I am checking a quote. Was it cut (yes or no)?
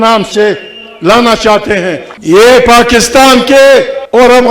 yes